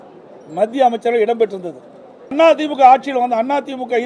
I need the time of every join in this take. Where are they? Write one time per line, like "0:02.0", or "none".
0:02.3